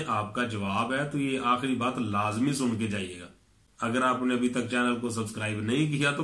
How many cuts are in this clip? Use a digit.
0